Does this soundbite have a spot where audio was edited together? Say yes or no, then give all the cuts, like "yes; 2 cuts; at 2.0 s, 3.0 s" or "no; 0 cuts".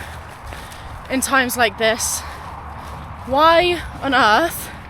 no; 0 cuts